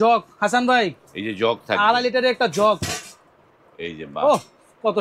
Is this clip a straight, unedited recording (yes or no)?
yes